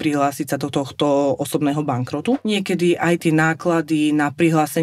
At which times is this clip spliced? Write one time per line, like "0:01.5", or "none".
0:02.4